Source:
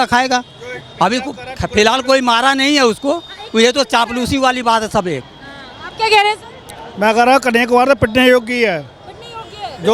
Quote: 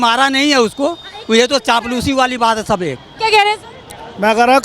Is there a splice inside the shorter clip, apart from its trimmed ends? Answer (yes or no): yes